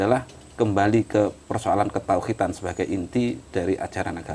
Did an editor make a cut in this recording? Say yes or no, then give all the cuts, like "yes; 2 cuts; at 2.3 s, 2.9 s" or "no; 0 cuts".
no; 0 cuts